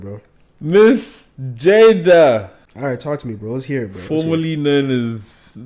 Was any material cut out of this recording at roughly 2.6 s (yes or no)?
yes